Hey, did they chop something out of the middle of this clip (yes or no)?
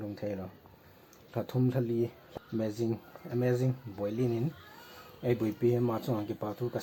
yes